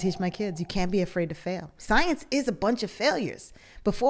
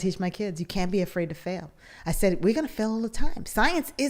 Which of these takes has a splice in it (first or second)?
first